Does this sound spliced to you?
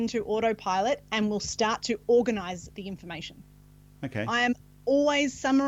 no; 0 cuts

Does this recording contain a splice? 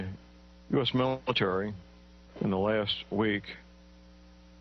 no; 0 cuts

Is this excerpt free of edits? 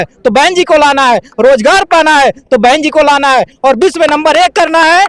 yes; 0 cuts

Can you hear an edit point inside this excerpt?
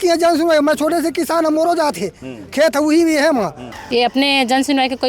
yes; 1 cut; at 3.6 s

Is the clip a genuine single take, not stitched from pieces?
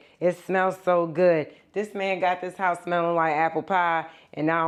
yes; 0 cuts

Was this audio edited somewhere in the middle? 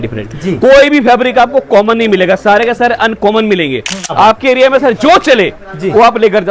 yes; 1 cut; at 4.1 s

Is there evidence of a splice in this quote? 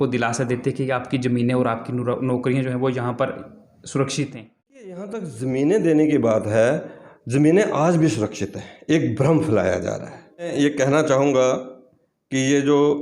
yes; 2 cuts; at 4.9 s, 10.5 s

